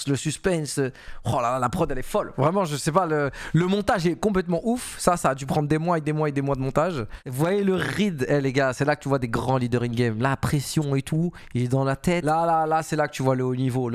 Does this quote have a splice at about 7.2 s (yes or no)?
yes